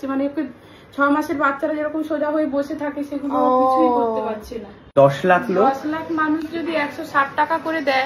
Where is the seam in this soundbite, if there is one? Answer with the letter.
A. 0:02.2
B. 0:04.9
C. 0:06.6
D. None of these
B